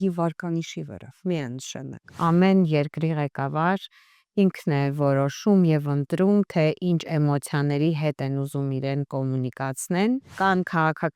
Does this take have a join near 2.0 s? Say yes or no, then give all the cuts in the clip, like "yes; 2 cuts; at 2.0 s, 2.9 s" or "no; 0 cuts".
yes; 2 cuts; at 2.0 s, 10.3 s